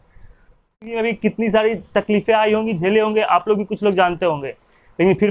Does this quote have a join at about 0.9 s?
yes; 1 cut; at 0.9 s

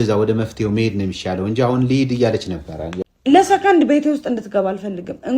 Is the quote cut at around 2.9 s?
yes; 1 cut; at 2.9 s

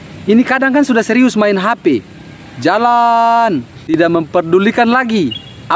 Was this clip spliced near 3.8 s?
yes; 1 cut; at 3.8 s

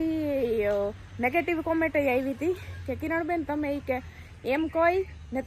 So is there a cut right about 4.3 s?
no; 0 cuts

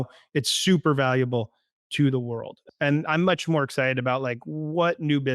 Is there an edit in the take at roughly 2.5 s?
yes; 1 cut; at 2.5 s

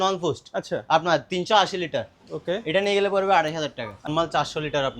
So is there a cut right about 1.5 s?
no; 1 cut; at 4.1 s

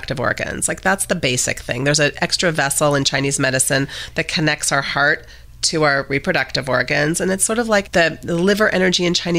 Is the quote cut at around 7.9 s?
yes; 1 cut; at 7.9 s

